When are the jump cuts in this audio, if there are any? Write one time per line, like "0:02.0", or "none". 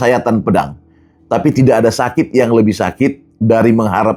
none

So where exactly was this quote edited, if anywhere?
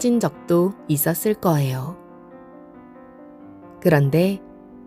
0:02.0
0:03.8

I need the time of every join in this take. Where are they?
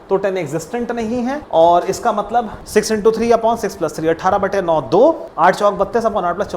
0:01.4
0:02.6
0:05.3

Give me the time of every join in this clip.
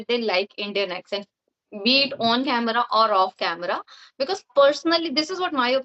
none

